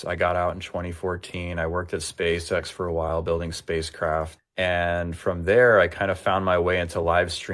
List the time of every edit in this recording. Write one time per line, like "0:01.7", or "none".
0:04.4